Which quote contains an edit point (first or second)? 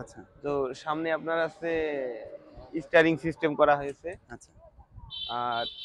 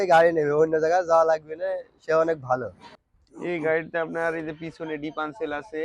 second